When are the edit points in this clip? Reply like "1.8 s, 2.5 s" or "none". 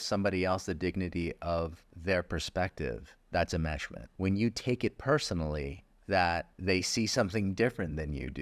1.9 s, 3.1 s, 4.0 s, 5.9 s, 6.5 s